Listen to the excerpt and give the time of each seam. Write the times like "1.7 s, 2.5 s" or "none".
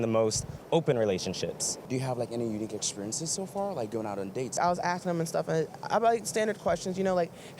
1.9 s, 4.6 s

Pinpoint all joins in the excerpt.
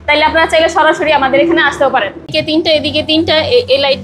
2.3 s

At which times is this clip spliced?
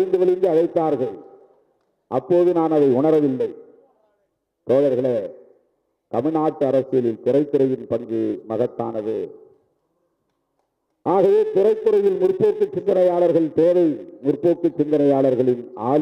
none

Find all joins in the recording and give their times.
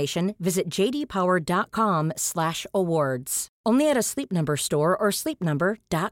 none

